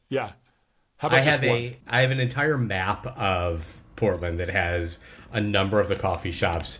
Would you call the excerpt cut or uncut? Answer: cut